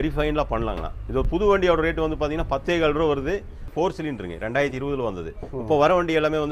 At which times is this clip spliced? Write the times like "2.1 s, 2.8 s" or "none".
3.7 s